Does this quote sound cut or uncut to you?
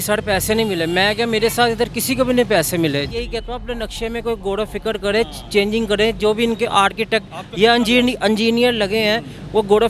cut